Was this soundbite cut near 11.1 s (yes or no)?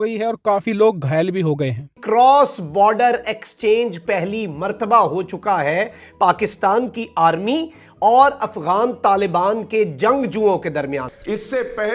yes